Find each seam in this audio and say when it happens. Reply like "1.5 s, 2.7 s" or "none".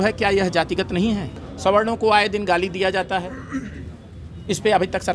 1.3 s